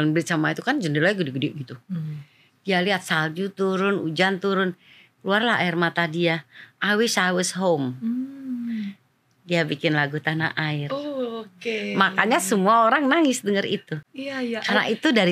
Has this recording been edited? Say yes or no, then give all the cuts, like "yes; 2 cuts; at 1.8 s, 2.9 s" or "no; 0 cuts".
no; 0 cuts